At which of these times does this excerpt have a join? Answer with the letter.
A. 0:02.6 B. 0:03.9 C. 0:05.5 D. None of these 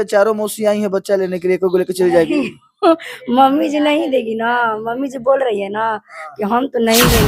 D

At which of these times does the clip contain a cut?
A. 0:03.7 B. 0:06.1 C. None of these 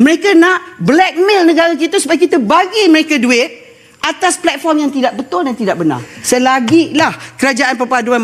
B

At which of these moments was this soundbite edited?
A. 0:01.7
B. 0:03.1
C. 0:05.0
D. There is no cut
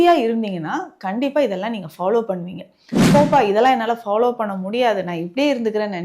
B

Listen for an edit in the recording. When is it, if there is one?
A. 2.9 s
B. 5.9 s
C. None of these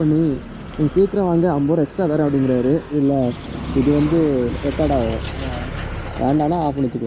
A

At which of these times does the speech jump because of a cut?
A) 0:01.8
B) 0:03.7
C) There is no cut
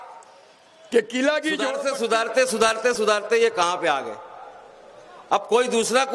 A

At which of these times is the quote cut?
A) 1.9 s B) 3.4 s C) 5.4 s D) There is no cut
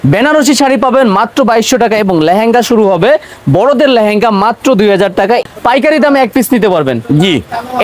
C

